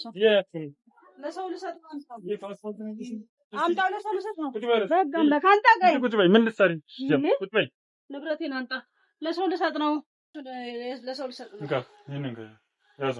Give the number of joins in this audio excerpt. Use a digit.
1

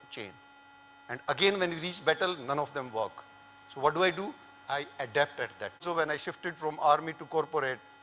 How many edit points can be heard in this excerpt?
1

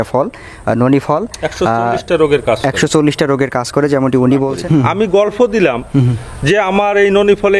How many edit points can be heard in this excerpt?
1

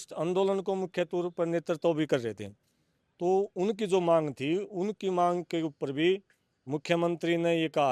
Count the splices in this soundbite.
0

